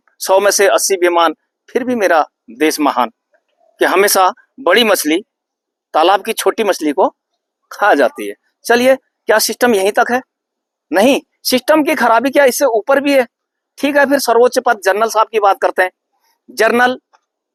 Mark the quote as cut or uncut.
uncut